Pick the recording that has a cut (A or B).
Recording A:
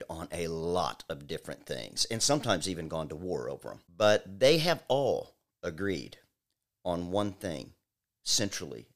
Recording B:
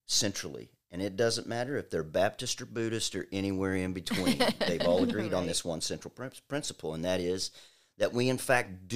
A